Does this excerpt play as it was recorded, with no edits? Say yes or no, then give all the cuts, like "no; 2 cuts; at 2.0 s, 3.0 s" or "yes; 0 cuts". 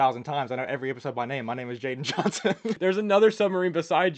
no; 1 cut; at 2.7 s